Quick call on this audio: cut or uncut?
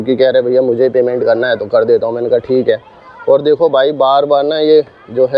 uncut